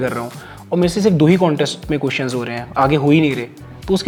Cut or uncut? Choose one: uncut